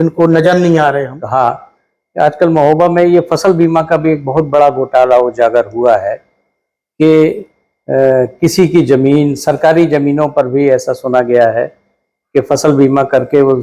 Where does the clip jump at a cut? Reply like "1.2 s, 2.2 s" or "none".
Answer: 1.2 s